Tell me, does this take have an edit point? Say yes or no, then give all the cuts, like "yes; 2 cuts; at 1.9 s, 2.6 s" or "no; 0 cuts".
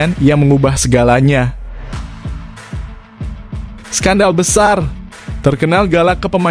yes; 2 cuts; at 1.9 s, 4.0 s